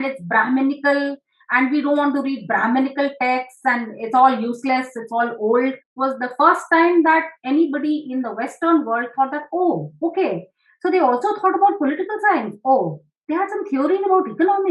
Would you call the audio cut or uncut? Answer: cut